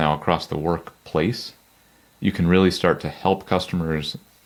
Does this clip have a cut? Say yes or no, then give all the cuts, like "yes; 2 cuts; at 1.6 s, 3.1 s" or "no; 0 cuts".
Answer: no; 0 cuts